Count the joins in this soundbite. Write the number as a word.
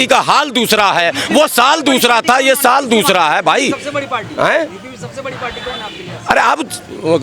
zero